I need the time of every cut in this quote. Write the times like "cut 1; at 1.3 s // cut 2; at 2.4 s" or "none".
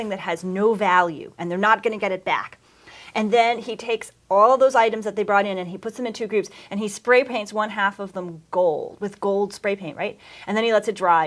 cut 1; at 3.6 s